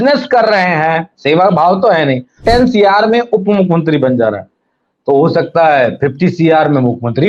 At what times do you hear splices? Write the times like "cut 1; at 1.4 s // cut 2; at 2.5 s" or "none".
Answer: cut 1; at 2.4 s